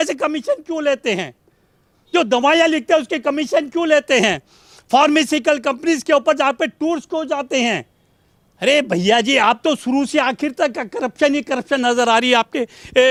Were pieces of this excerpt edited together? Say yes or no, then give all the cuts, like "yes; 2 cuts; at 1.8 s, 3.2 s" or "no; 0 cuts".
no; 0 cuts